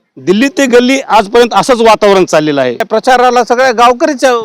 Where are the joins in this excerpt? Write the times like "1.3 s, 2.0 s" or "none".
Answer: 2.9 s